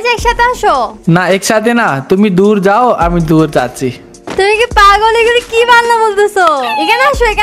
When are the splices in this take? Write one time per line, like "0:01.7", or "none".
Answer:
0:01.0